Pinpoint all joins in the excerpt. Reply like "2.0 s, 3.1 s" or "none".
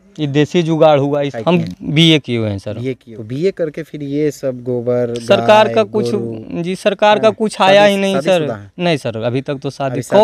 1.3 s, 3.1 s